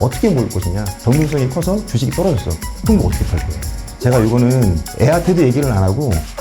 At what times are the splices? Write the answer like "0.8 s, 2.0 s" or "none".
0.9 s, 3.9 s